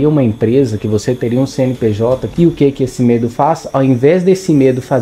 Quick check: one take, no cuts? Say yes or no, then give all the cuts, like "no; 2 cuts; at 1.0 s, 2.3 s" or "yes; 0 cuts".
no; 1 cut; at 2.3 s